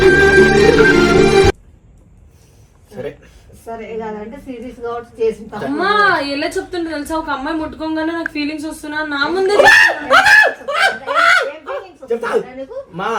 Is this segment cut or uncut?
uncut